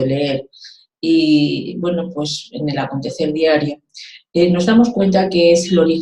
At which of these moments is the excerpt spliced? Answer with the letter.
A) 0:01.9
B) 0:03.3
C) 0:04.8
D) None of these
C